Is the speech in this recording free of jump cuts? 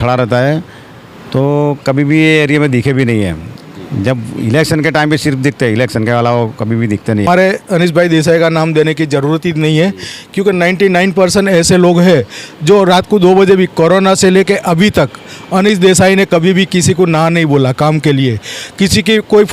no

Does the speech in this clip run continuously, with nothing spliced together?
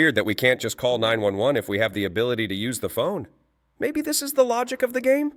yes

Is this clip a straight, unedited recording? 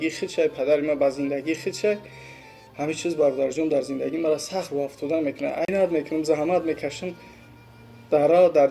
no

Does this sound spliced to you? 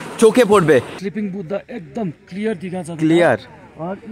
yes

